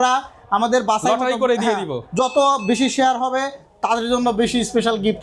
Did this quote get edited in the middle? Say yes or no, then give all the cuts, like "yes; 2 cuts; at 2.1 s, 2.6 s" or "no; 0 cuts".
no; 0 cuts